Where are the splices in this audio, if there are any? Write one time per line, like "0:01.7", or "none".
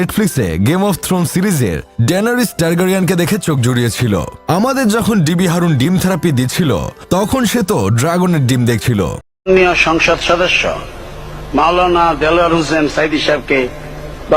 0:09.3